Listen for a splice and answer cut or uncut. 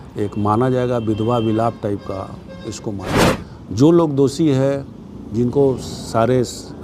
cut